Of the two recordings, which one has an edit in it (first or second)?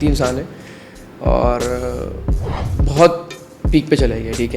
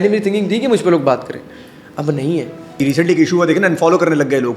second